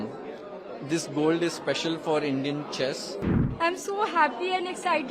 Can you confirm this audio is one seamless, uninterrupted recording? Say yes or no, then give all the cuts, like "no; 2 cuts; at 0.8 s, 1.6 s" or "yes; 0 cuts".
no; 1 cut; at 3.2 s